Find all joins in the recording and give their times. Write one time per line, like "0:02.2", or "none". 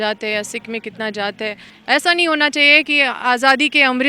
0:01.7